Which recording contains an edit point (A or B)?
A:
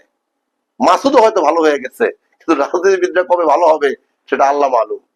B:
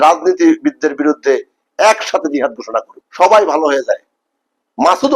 B